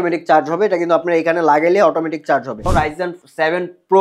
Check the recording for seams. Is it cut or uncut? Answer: cut